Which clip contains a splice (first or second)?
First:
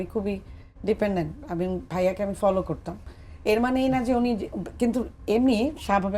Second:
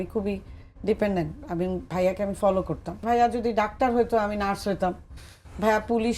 second